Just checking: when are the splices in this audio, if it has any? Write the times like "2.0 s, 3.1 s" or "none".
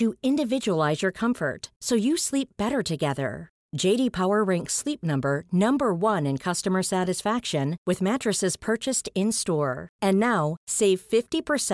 none